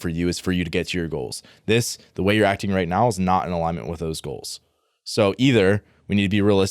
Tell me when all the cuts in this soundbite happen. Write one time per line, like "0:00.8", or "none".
none